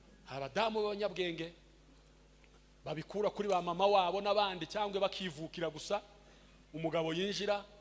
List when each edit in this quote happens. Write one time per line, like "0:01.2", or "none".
none